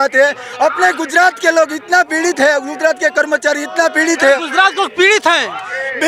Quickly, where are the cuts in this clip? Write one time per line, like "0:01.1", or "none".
none

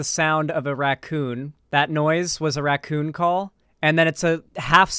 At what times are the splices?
0:01.5
0:03.6

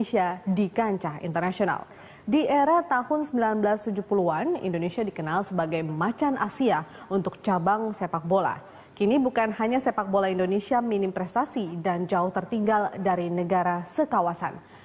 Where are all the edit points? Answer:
0:09.5

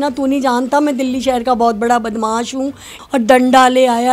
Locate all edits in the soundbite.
0:02.9

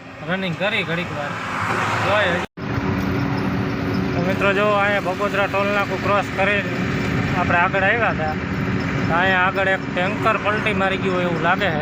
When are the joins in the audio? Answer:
0:02.4

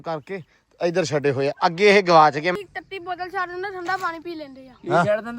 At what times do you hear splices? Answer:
0:02.5

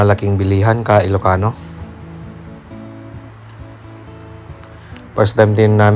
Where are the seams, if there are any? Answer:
0:01.6
0:04.6

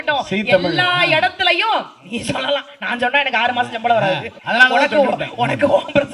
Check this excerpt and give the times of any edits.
0:04.3

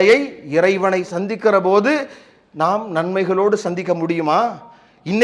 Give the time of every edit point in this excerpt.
none

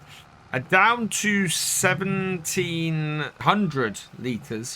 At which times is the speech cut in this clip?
0:03.4

